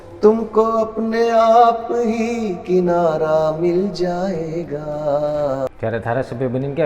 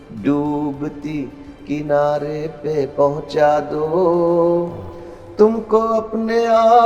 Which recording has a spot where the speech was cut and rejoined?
first; 1 cut; at 5.7 s

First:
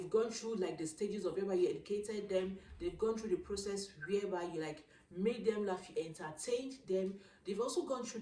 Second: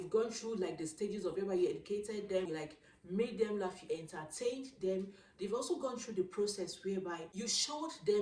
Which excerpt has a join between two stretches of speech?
second; 2 cuts; at 2.5 s, 7.3 s

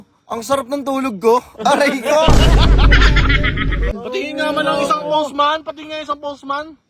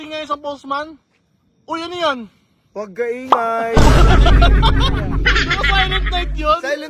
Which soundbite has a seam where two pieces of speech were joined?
first; 1 cut; at 3.9 s

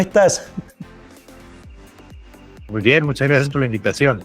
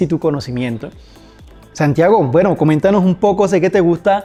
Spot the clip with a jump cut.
first; 1 cut; at 2.6 s

